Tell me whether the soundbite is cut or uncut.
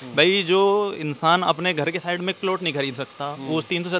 uncut